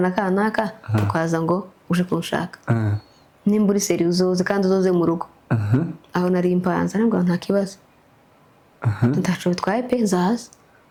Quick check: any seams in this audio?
no; 0 cuts

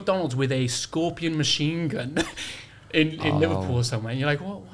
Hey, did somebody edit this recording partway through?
no; 0 cuts

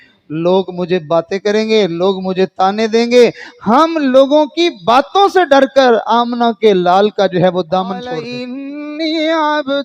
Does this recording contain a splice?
yes; 1 cut; at 8.3 s

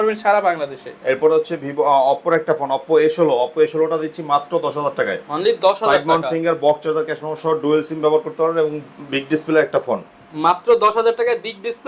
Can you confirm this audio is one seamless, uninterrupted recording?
yes; 0 cuts

